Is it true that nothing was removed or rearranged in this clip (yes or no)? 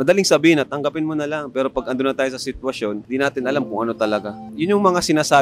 no